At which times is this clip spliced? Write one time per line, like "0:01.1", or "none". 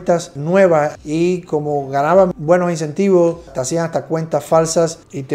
none